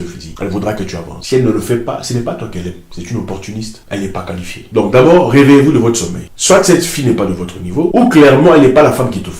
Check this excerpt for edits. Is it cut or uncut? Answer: uncut